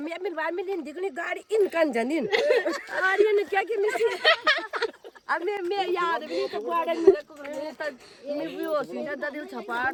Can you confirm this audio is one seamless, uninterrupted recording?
yes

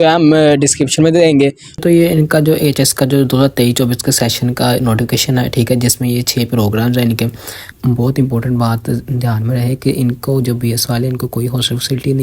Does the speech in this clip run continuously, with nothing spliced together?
no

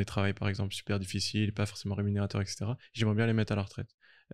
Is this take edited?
no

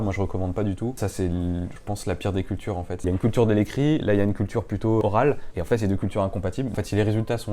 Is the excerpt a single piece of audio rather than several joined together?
no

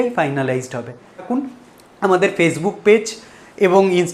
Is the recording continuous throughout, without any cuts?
no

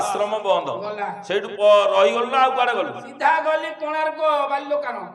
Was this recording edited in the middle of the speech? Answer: no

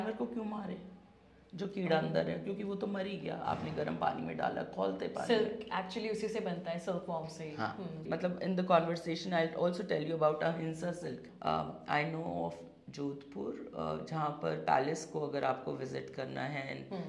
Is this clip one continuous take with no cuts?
no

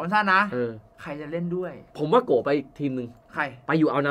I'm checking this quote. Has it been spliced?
no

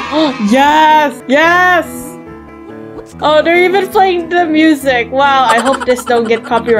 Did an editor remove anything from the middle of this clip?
no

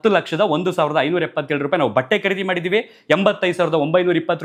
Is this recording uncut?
yes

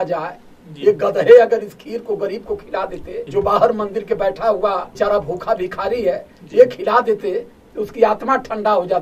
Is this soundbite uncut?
no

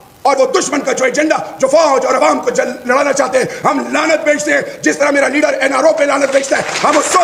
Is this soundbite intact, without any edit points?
yes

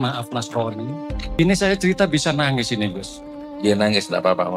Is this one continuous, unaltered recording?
no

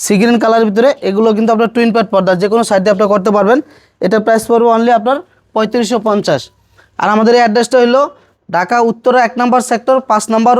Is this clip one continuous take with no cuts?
yes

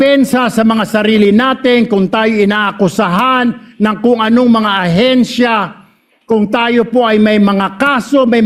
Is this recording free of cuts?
yes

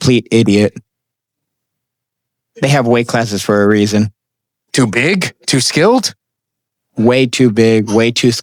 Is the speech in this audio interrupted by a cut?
no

